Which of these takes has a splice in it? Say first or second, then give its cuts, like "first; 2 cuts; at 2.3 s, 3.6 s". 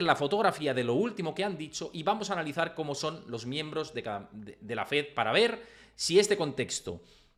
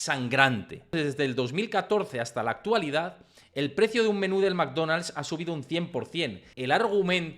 second; 2 cuts; at 0.9 s, 6.4 s